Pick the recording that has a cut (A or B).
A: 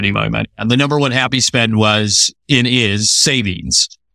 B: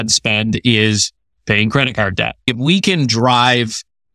B